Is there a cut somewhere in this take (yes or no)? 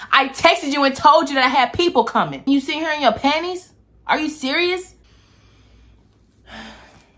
no